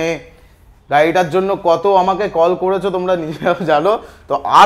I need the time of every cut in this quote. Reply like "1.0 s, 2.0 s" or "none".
none